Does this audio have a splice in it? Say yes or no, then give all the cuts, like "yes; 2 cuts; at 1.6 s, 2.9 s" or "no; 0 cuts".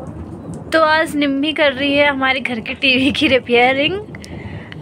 no; 0 cuts